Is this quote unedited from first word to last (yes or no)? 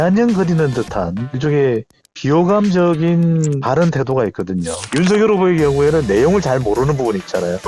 no